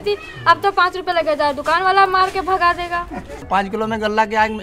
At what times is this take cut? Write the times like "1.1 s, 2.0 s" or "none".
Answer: 3.4 s